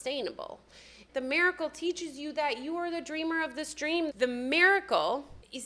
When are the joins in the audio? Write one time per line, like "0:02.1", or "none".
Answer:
0:01.0
0:04.1